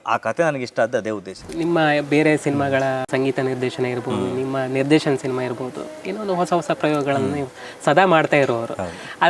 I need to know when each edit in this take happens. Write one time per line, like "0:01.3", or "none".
0:01.5
0:03.0